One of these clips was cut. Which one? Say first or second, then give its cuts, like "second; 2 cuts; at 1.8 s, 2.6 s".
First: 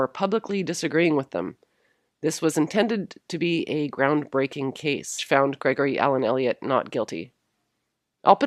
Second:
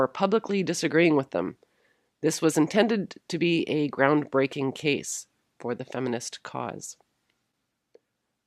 second; 1 cut; at 5.1 s